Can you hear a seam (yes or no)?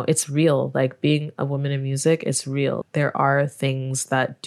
no